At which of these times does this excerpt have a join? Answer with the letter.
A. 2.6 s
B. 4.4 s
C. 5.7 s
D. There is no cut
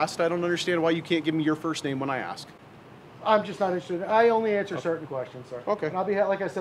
D